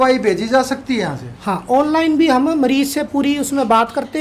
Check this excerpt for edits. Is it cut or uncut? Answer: uncut